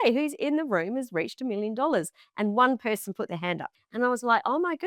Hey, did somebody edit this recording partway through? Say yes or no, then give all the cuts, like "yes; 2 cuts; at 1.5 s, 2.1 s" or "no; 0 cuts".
yes; 1 cut; at 3.8 s